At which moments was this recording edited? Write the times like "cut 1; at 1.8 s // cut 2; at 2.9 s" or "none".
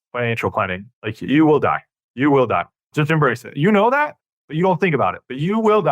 cut 1; at 2.0 s // cut 2; at 2.9 s